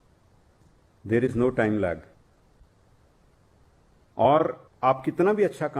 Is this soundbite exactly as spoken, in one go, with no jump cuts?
yes; 0 cuts

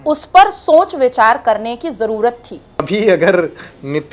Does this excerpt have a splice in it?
yes; 1 cut; at 2.9 s

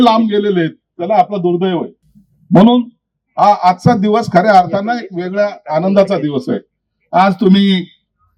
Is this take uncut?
yes; 0 cuts

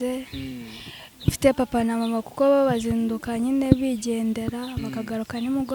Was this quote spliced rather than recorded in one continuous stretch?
no; 0 cuts

